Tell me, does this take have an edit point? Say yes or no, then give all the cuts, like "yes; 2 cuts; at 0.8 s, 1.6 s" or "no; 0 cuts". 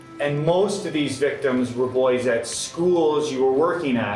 no; 0 cuts